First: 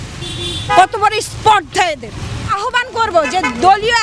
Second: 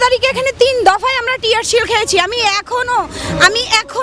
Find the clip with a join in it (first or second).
first